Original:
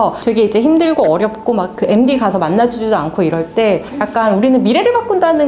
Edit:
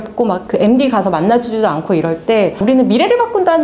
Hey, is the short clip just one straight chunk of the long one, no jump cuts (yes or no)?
no